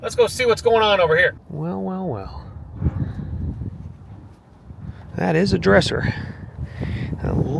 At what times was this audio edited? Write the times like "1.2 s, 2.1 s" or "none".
none